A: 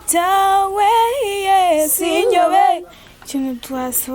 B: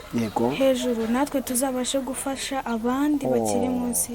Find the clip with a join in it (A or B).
A